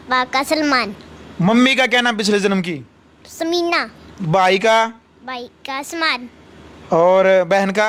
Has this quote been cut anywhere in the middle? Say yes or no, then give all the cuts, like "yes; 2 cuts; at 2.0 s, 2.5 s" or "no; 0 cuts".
no; 0 cuts